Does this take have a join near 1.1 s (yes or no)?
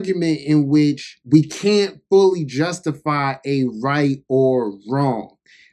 yes